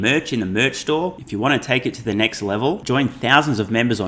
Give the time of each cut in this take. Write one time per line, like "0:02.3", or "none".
none